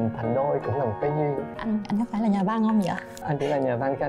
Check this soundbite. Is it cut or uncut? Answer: cut